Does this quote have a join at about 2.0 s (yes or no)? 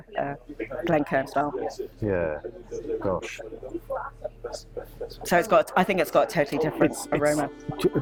no